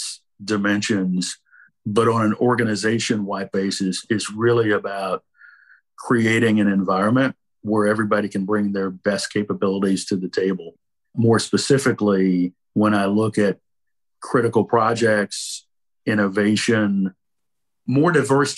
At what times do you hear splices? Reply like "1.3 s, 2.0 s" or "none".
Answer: 1.7 s